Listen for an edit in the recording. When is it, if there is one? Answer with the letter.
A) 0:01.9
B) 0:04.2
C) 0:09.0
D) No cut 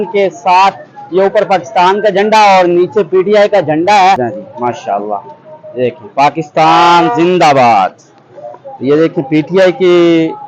B